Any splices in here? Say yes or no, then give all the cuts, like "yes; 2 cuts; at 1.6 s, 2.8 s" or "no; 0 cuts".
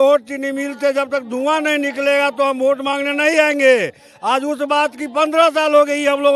no; 0 cuts